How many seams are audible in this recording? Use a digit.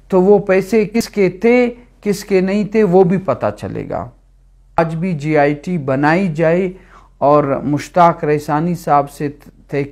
2